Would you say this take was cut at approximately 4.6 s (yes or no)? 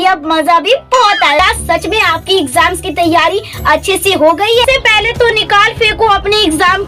yes